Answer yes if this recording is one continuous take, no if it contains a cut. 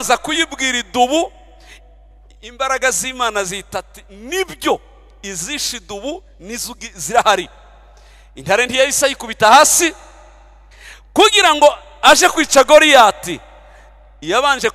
yes